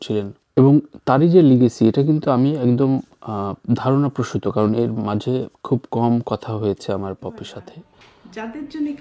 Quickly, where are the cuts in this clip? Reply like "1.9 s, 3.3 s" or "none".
7.8 s